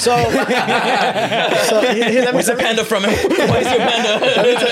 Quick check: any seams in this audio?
no; 0 cuts

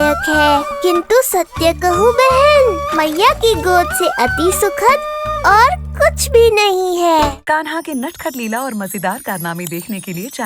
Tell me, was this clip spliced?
yes; 1 cut; at 7.3 s

